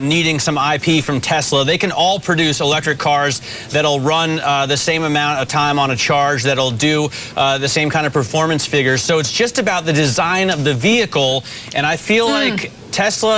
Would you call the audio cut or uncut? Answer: uncut